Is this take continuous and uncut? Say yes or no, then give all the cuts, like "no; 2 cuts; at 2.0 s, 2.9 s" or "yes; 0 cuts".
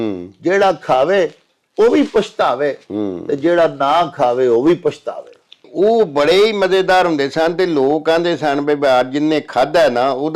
no; 1 cut; at 5.7 s